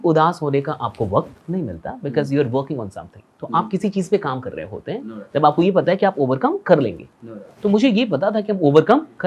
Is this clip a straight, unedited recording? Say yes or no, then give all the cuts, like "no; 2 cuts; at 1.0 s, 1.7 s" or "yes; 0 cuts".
yes; 0 cuts